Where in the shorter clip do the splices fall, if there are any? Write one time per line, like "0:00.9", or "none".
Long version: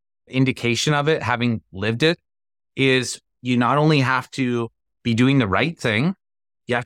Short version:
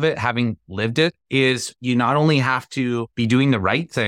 0:01.6
0:03.1